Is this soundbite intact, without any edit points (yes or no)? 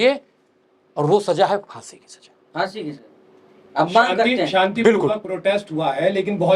yes